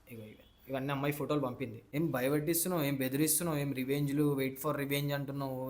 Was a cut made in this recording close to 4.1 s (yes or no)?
no